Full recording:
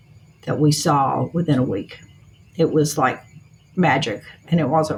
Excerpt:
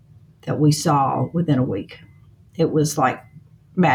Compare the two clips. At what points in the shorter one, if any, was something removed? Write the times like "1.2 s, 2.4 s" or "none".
none